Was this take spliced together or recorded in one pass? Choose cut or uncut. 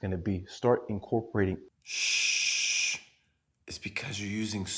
cut